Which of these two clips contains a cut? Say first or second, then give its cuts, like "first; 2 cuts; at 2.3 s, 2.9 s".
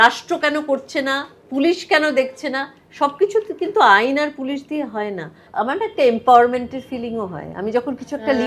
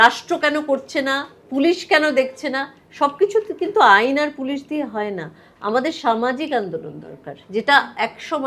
first; 1 cut; at 5.5 s